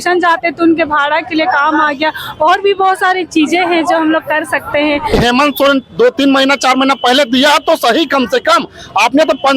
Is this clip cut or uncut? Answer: cut